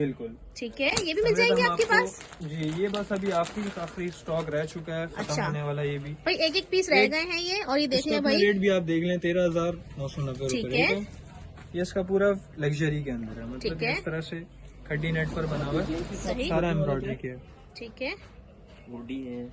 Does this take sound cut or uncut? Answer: uncut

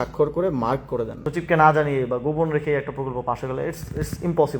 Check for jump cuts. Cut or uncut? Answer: cut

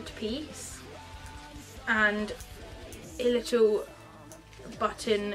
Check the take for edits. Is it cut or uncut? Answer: uncut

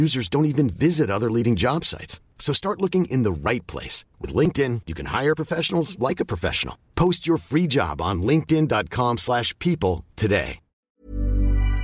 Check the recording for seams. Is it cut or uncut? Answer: uncut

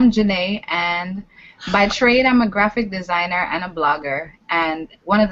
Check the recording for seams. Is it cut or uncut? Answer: uncut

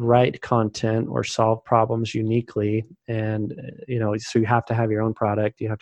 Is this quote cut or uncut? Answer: uncut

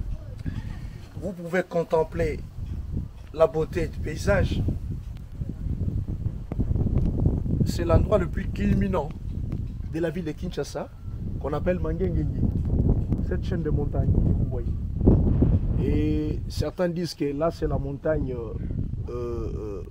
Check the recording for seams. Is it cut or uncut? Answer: uncut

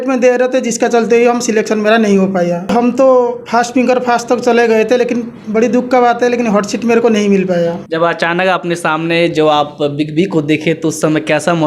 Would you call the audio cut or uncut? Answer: cut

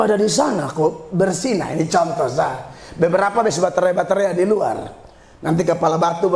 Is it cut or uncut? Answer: uncut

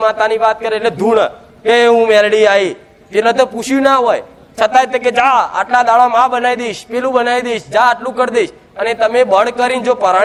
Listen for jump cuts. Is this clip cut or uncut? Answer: uncut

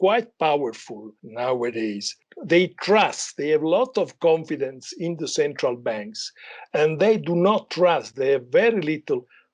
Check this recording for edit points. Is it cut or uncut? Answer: cut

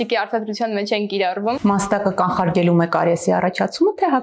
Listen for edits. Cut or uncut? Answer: cut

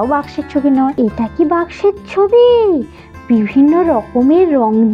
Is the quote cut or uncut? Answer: cut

